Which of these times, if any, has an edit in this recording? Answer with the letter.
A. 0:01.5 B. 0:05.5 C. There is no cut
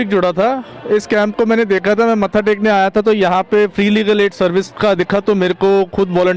C